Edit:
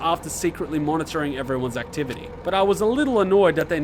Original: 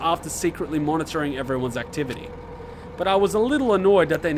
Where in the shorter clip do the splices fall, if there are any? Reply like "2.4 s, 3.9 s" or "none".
2.3 s